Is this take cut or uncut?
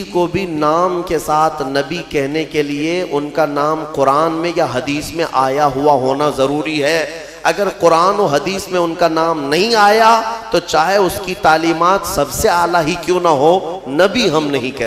uncut